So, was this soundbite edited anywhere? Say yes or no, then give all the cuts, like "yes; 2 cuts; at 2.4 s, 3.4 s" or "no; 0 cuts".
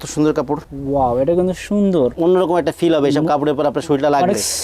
yes; 1 cut; at 2.2 s